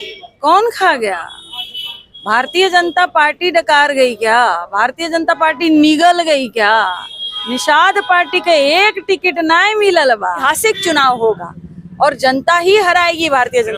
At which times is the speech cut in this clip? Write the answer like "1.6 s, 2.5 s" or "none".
10.4 s